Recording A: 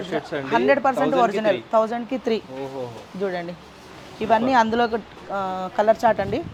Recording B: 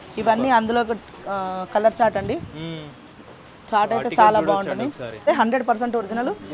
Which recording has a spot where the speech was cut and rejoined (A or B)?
B